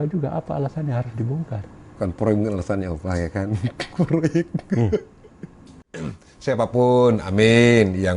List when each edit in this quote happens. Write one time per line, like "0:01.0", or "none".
0:06.0